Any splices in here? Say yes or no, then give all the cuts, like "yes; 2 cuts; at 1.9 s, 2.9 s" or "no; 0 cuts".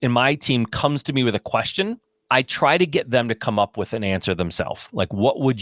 yes; 1 cut; at 2.1 s